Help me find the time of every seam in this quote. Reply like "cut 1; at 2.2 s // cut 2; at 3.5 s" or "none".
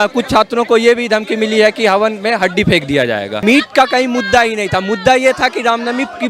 cut 1; at 3.3 s